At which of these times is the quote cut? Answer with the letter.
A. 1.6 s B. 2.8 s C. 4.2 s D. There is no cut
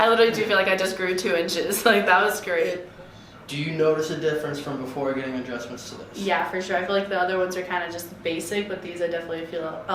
B